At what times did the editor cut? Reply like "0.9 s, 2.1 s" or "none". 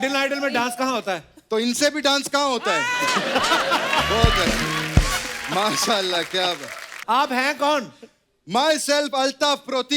6.9 s